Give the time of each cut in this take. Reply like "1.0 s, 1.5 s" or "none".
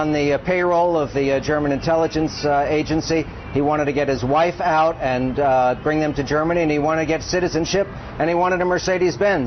none